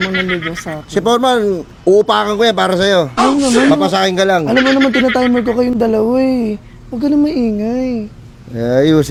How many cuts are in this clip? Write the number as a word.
zero